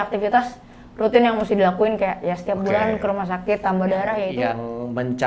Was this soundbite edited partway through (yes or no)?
yes